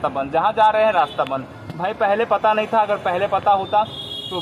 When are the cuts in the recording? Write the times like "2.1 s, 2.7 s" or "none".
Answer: none